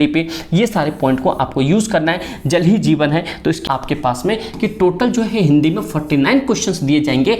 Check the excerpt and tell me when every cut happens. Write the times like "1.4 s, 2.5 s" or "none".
3.6 s